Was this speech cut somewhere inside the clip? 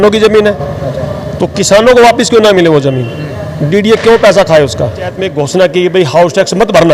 yes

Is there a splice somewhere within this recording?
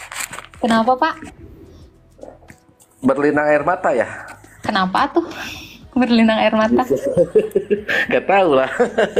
no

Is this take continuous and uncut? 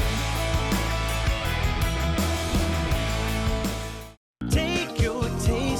yes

